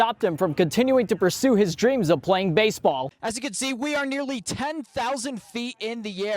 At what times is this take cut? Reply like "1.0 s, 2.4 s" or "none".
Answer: 3.1 s